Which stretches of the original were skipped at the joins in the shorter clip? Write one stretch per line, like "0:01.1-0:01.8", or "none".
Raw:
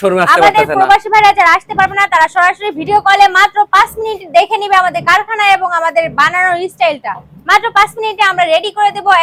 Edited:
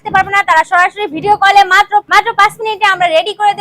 0:03.7-0:07.4